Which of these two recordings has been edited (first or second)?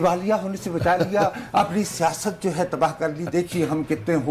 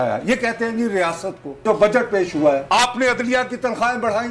second